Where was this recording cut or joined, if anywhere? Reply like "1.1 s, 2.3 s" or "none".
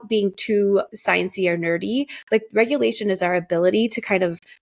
0.9 s